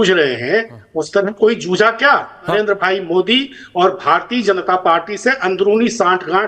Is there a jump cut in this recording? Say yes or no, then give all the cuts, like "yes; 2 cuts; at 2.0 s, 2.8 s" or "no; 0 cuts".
yes; 1 cut; at 2.4 s